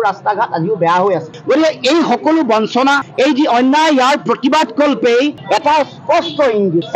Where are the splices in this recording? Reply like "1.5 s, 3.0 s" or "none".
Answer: 5.4 s